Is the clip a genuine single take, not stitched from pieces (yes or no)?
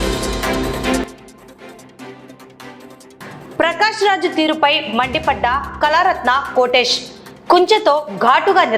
no